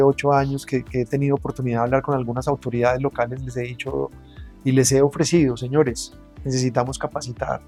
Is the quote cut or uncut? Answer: uncut